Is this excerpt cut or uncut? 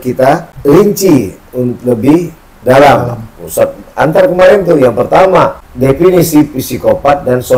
cut